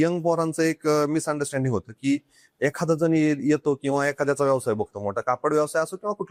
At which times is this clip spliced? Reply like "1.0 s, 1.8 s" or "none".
none